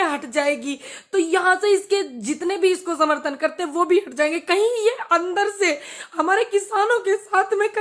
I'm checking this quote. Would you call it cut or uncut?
uncut